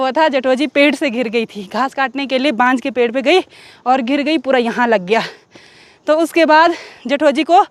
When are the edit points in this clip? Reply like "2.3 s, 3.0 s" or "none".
none